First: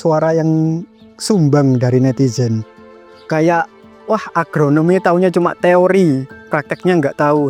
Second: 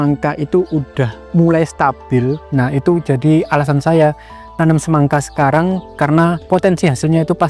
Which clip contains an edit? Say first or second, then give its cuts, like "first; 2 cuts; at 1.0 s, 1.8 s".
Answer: second; 3 cuts; at 1.2 s, 2.4 s, 6.4 s